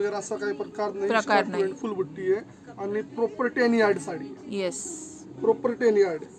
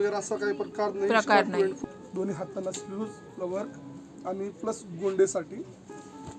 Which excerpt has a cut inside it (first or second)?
second